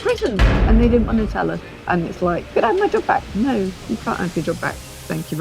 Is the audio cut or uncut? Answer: cut